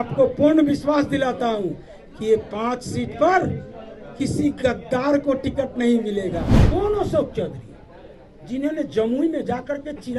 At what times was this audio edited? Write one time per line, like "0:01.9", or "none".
0:06.5